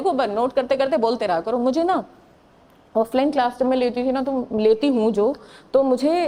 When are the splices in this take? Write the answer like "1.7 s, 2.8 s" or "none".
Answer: none